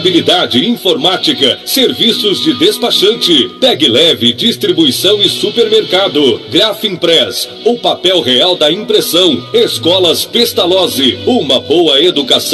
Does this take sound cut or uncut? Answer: uncut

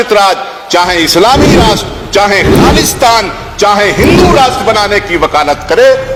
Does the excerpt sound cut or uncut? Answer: uncut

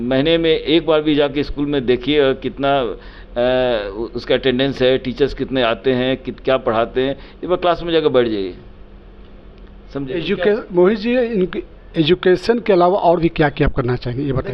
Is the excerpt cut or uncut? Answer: uncut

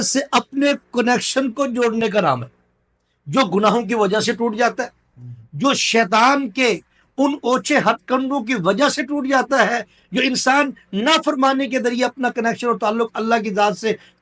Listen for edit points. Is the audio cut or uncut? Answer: uncut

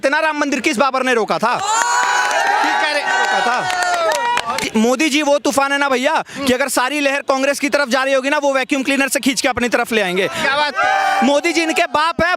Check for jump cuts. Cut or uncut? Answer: cut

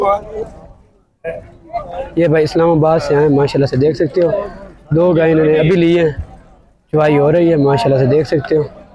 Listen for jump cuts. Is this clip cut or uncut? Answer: uncut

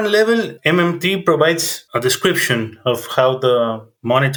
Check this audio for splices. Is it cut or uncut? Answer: uncut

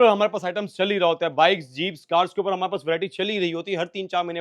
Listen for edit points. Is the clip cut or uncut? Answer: uncut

